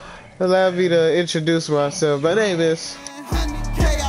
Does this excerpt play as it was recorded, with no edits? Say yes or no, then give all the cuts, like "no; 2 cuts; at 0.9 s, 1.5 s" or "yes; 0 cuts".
no; 1 cut; at 3.1 s